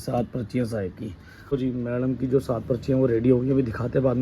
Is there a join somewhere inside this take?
yes; 1 cut; at 1.3 s

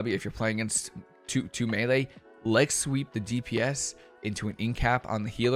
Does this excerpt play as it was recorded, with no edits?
yes; 0 cuts

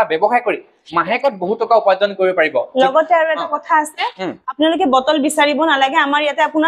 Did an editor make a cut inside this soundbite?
no; 0 cuts

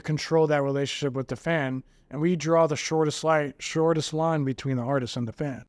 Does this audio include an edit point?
no; 0 cuts

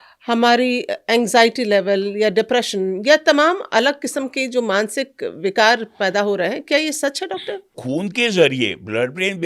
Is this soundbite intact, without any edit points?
no; 1 cut; at 7.8 s

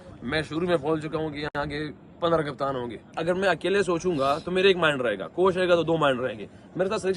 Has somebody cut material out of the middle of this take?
yes; 1 cut; at 3.1 s

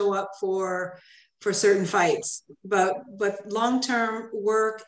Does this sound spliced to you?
no; 0 cuts

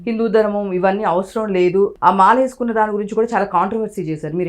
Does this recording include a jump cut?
yes; 1 cut; at 1.9 s

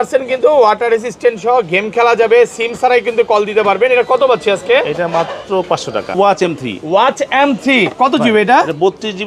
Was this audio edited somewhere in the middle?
yes; 1 cut; at 6.1 s

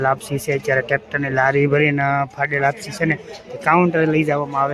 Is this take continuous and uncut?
yes; 0 cuts

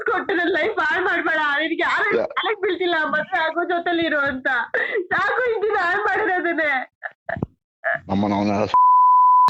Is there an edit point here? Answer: no; 0 cuts

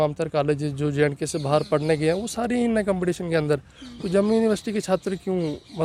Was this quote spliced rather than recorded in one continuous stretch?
no; 0 cuts

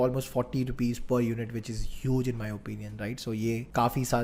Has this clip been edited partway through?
no; 0 cuts

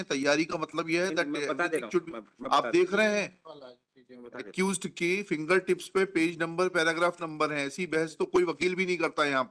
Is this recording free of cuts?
yes; 0 cuts

